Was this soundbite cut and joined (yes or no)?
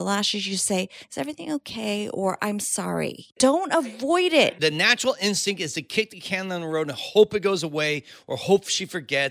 yes